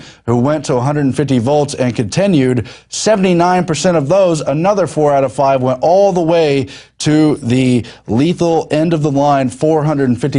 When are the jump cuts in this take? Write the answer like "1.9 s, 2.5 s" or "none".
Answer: 5.8 s